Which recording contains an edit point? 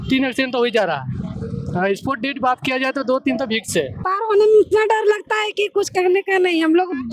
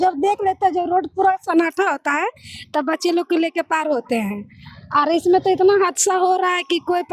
first; 1 cut; at 4.0 s

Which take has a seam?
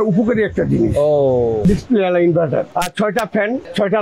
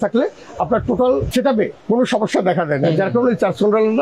first; 2 cuts; at 1.6 s, 2.7 s

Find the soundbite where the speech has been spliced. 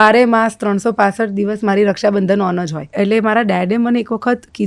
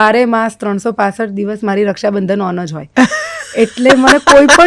first; 1 cut; at 2.8 s

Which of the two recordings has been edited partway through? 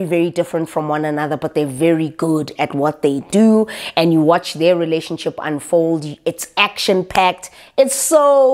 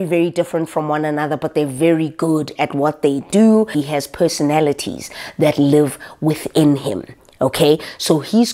second; 1 cut; at 3.8 s

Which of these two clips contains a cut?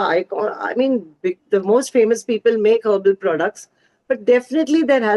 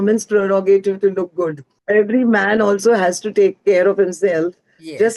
second; 1 cut; at 1.7 s

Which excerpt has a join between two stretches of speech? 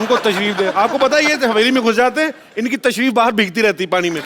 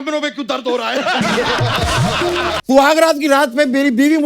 second; 1 cut; at 2.6 s

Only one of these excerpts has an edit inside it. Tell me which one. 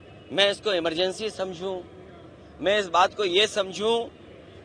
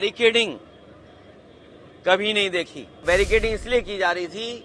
second; 1 cut; at 3.0 s

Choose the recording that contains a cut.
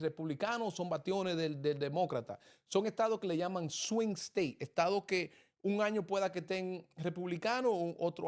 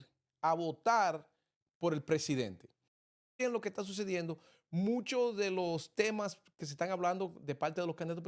second; 1 cut; at 3.2 s

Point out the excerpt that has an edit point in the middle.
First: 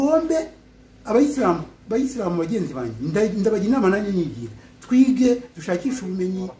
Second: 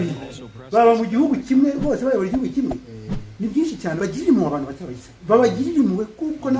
second; 1 cut; at 4.0 s

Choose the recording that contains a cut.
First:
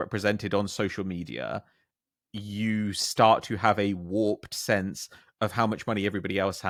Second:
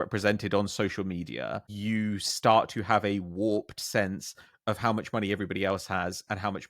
second; 1 cut; at 1.7 s

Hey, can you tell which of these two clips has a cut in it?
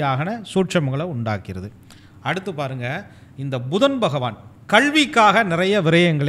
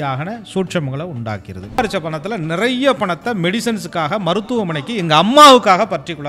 second; 1 cut; at 1.8 s

